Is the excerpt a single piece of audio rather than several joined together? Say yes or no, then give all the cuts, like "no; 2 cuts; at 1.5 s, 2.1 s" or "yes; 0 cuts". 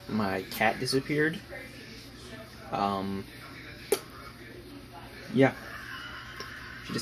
yes; 0 cuts